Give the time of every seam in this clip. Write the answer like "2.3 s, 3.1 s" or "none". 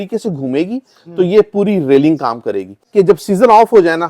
2.8 s